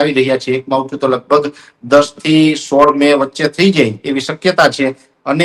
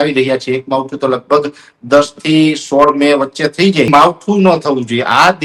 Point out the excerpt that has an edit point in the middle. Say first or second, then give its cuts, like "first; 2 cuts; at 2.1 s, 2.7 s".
second; 1 cut; at 3.9 s